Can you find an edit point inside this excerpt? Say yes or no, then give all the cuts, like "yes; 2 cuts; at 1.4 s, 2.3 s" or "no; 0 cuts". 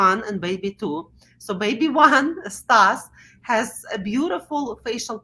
no; 0 cuts